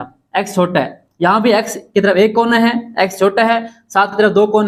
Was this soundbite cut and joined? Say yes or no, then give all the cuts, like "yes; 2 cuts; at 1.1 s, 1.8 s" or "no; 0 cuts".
no; 0 cuts